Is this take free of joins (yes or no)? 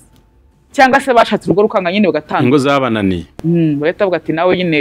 yes